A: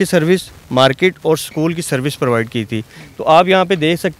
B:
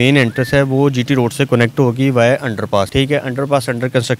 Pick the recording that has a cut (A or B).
B